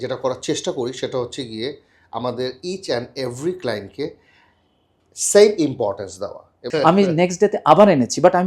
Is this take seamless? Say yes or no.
no